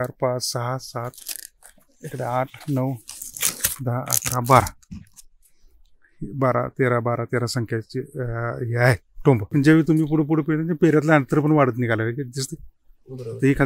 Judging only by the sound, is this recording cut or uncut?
cut